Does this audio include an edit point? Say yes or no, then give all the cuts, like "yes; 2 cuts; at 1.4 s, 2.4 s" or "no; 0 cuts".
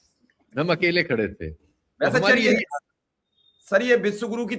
no; 0 cuts